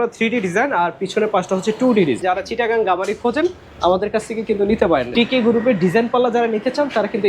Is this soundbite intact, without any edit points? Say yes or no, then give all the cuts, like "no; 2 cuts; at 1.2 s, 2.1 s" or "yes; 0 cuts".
no; 2 cuts; at 2.2 s, 5.1 s